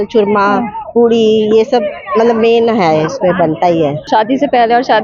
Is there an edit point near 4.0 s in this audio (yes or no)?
yes